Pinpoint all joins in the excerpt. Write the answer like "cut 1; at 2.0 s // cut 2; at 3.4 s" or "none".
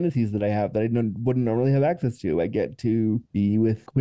none